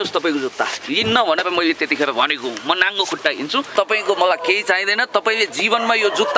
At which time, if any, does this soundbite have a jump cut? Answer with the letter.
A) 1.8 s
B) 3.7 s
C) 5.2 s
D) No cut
B